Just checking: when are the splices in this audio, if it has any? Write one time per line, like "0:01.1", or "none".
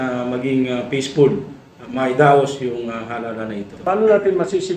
0:03.7